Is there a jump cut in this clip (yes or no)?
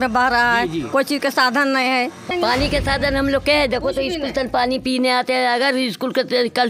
yes